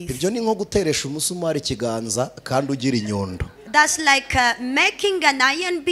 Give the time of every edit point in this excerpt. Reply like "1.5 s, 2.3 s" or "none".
none